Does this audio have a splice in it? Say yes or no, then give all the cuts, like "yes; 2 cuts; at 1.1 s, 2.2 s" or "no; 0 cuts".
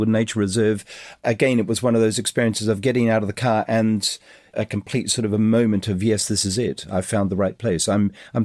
yes; 2 cuts; at 1.2 s, 4.5 s